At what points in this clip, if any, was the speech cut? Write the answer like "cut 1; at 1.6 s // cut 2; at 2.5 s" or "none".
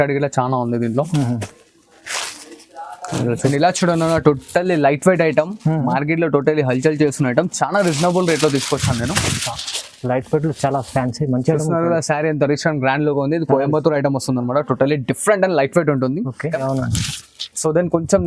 cut 1; at 3.5 s // cut 2; at 16.6 s